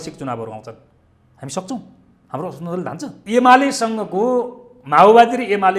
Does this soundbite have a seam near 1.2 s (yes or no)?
no